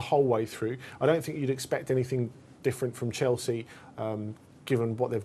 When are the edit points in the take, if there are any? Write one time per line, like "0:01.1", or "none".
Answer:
0:03.3